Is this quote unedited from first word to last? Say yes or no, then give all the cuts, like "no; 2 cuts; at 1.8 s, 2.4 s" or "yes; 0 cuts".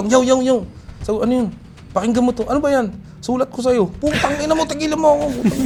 yes; 0 cuts